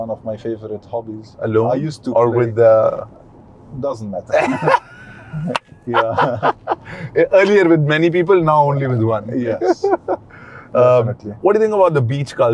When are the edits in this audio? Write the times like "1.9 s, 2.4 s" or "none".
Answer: none